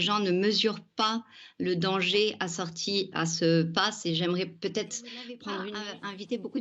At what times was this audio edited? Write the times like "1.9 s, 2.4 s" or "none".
5.7 s